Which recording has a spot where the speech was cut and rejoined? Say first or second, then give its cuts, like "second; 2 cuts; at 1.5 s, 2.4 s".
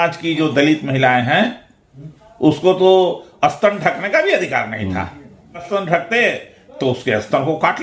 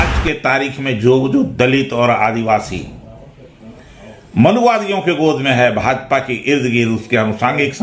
first; 1 cut; at 5.6 s